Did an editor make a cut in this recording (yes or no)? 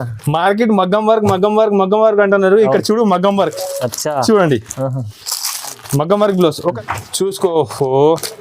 yes